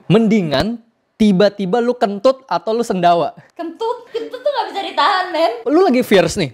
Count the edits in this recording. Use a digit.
2